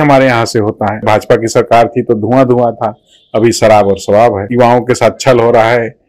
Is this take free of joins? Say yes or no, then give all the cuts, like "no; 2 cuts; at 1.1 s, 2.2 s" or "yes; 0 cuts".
no; 2 cuts; at 1.1 s, 4.4 s